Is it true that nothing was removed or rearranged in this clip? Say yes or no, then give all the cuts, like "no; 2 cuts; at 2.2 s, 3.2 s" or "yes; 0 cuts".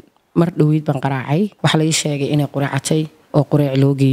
no; 1 cut; at 1.5 s